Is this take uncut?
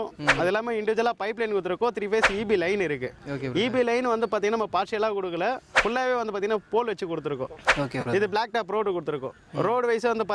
yes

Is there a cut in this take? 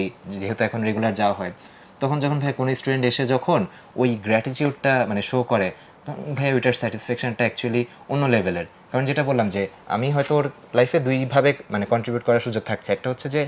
no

